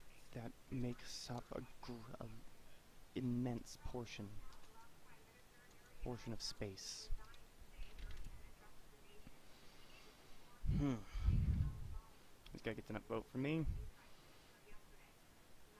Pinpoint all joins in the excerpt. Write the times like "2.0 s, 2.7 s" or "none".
13.6 s